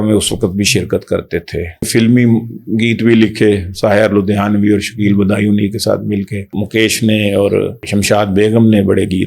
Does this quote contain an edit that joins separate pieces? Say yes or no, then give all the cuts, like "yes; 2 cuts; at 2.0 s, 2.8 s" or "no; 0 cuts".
yes; 3 cuts; at 1.9 s, 6.5 s, 7.8 s